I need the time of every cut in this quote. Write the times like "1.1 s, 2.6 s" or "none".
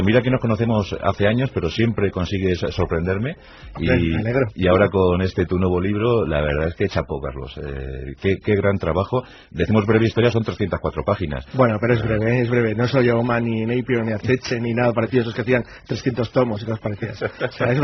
none